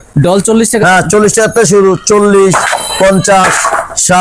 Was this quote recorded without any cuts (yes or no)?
yes